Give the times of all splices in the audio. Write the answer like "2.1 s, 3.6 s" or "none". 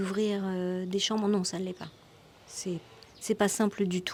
none